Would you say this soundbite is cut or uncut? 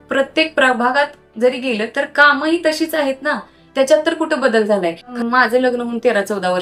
cut